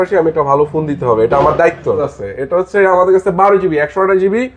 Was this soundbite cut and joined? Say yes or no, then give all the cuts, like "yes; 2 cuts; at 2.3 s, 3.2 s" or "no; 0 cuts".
yes; 1 cut; at 2.2 s